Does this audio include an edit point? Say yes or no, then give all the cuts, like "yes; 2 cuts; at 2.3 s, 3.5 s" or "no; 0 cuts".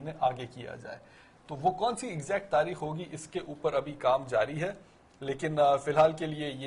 yes; 1 cut; at 3.3 s